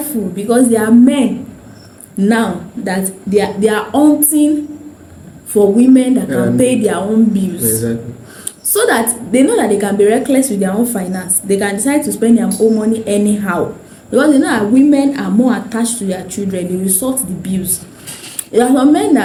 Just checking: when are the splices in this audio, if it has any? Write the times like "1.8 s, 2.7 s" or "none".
none